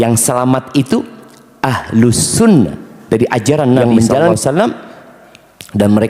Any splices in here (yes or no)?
yes